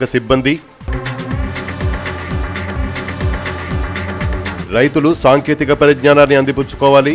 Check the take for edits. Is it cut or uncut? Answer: uncut